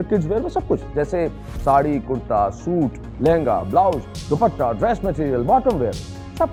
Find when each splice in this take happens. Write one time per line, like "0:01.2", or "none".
none